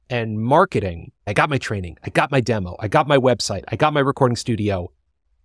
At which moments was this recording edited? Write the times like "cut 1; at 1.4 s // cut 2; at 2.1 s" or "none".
cut 1; at 1.2 s